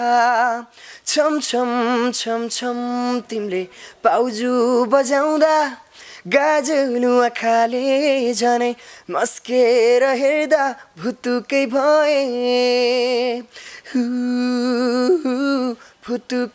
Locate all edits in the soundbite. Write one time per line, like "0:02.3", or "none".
none